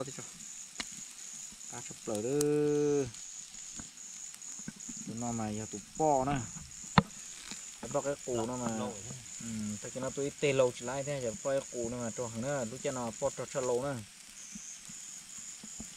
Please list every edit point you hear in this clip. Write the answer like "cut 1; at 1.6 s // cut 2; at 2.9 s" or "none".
none